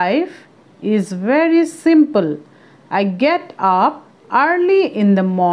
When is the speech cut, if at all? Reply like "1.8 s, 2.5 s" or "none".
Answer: 2.8 s